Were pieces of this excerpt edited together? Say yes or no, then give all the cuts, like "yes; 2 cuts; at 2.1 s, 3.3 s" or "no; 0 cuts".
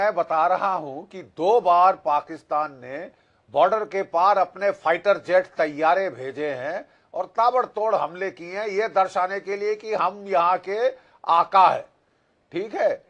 no; 0 cuts